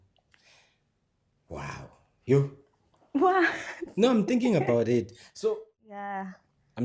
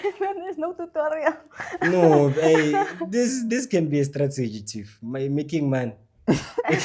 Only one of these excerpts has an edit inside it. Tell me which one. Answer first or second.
first